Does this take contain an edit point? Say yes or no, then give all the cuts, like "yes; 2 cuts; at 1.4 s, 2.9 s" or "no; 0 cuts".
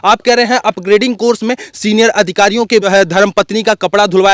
yes; 1 cut; at 2.9 s